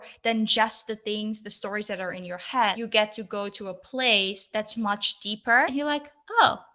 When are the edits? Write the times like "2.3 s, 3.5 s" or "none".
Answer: 2.8 s, 5.7 s